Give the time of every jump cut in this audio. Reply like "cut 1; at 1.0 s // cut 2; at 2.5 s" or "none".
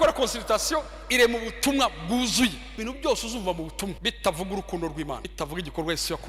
cut 1; at 2.8 s // cut 2; at 4.0 s // cut 3; at 5.3 s